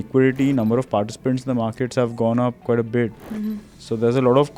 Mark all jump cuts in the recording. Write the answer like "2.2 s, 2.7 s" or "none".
none